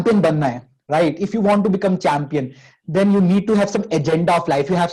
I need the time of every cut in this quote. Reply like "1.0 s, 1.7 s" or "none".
none